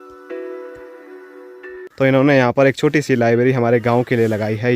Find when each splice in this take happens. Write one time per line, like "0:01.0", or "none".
0:01.8